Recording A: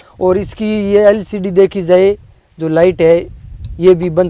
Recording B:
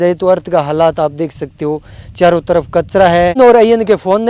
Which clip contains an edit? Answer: B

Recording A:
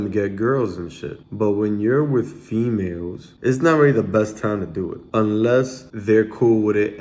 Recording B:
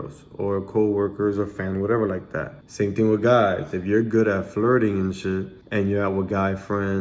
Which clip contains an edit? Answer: A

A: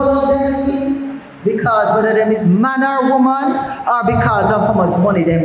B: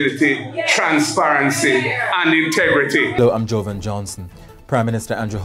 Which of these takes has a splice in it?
B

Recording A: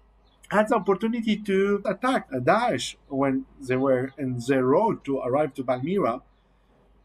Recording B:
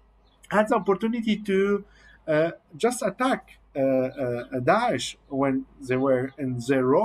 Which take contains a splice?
A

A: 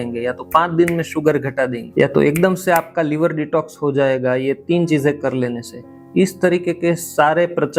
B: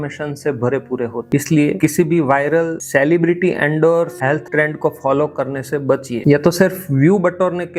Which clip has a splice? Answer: B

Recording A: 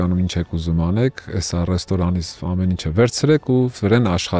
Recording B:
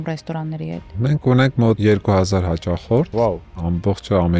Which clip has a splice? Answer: B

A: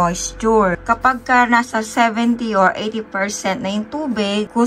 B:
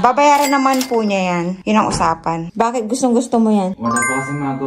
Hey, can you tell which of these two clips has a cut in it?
B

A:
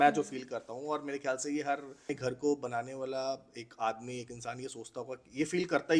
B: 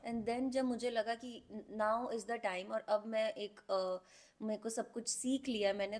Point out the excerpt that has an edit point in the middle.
A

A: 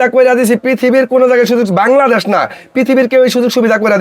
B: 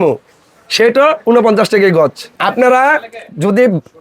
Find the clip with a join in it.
B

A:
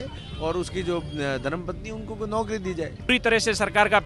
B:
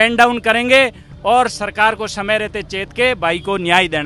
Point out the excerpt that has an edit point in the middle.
A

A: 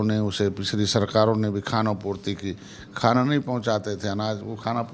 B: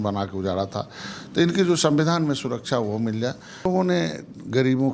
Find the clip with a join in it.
B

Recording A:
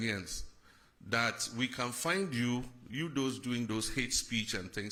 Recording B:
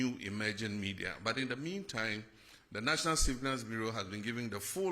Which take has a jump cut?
B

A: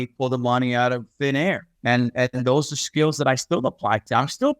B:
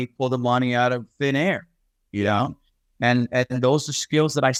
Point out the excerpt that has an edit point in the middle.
A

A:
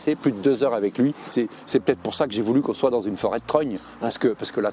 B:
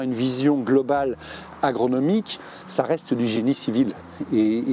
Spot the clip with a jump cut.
A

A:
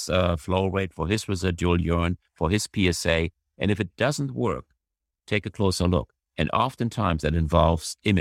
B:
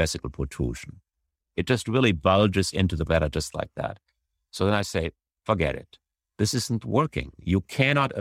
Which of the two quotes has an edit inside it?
B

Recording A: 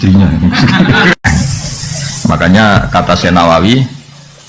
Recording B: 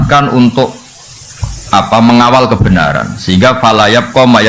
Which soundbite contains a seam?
A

